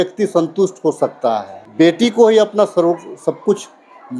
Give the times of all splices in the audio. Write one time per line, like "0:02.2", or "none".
0:01.6